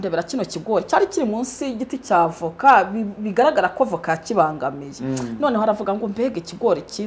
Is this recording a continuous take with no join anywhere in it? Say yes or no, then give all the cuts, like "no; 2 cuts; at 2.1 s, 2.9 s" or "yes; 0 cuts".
yes; 0 cuts